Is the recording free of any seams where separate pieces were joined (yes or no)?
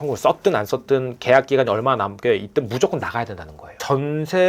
yes